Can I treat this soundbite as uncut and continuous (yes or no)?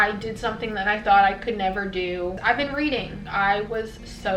no